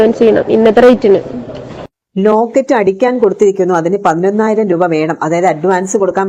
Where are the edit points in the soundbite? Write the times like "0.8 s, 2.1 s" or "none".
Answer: none

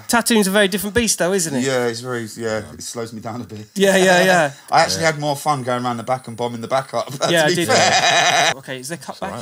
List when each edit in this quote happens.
8.5 s

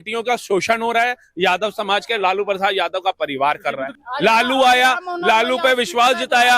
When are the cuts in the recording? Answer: 3.9 s

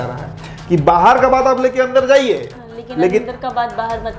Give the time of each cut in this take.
none

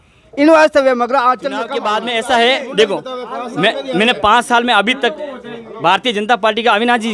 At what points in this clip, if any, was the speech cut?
1.8 s

